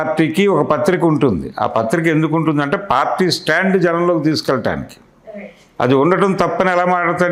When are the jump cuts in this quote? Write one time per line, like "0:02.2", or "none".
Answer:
none